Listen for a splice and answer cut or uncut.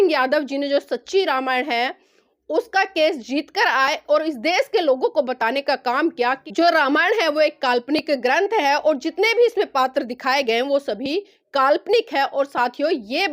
cut